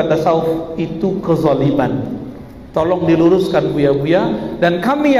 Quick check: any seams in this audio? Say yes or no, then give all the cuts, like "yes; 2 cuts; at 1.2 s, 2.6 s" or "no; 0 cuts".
no; 0 cuts